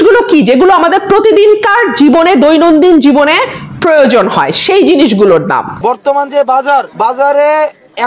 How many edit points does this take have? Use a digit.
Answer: 2